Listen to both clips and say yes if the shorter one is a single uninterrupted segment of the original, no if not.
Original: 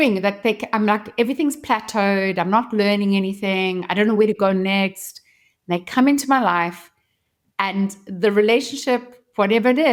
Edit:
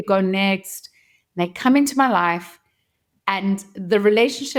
yes